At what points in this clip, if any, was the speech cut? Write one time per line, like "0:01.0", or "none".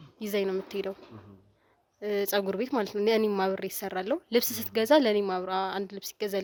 none